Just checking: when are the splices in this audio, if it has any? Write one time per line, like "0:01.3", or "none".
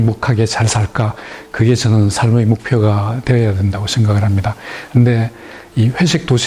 none